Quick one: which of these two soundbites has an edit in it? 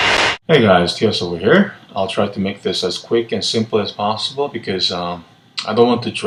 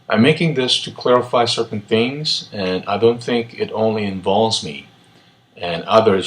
second; 1 cut; at 1.2 s

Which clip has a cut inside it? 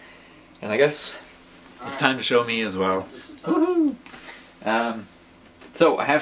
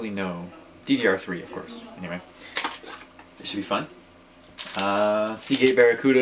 first; 1 cut; at 4.6 s

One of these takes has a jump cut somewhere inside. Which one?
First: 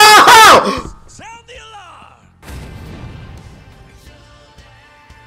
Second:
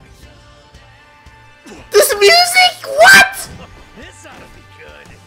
first; 1 cut; at 2.3 s

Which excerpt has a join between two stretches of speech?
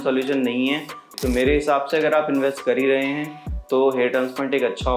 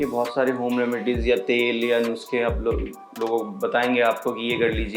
first; 1 cut; at 1.1 s

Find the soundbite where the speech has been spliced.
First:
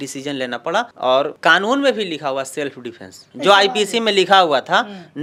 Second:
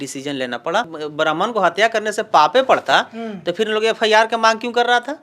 second; 1 cut; at 0.9 s

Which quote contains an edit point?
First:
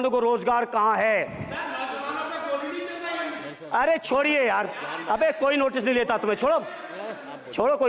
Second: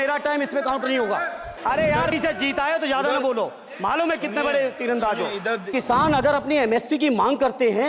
second; 2 cuts; at 1.5 s, 5.7 s

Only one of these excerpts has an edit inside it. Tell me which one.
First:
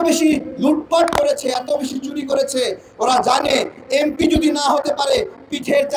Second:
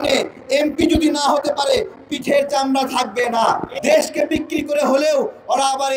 second; 1 cut; at 3.7 s

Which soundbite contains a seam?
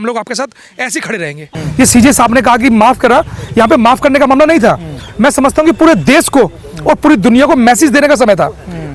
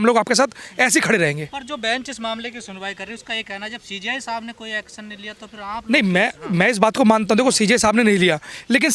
first; 1 cut; at 1.5 s

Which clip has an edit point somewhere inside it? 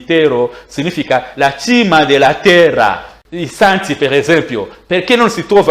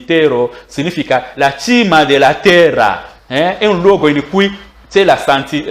first; 1 cut; at 3.2 s

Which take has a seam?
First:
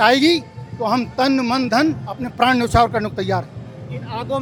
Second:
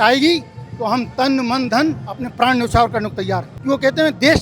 second; 1 cut; at 3.5 s

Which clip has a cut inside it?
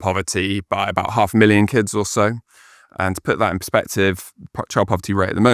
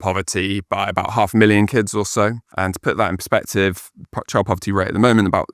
second; 1 cut; at 2.5 s

